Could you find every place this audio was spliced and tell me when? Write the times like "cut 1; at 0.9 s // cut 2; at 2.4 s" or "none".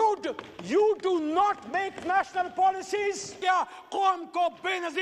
cut 1; at 3.4 s